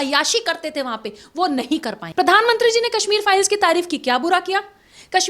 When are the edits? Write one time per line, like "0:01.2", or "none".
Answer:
0:02.0